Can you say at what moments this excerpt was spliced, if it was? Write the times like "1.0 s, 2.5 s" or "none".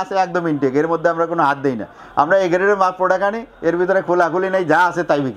none

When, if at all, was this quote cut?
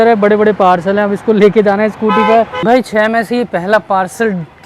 2.6 s

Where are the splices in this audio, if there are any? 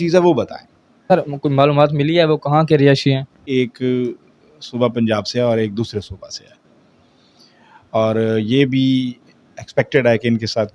1.1 s, 3.4 s

